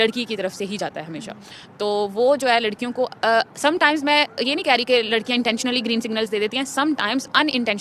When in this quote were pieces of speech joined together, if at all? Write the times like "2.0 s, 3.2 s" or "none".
none